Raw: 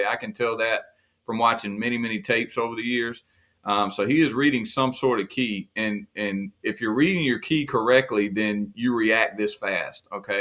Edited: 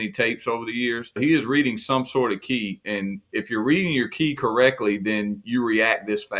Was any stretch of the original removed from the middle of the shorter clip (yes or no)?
yes